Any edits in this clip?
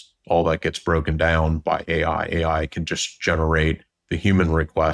yes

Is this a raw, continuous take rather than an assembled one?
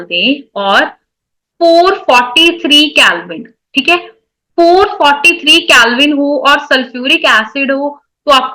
yes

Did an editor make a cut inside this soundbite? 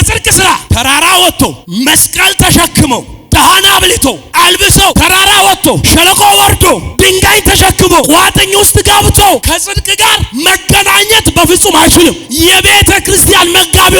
yes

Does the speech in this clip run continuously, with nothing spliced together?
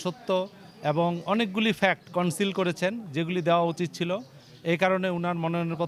yes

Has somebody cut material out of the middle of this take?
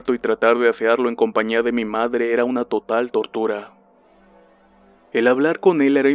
no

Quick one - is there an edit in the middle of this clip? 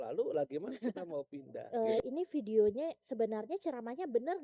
yes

